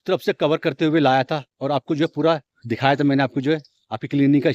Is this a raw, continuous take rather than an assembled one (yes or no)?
yes